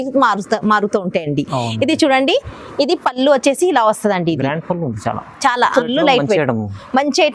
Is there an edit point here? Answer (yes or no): yes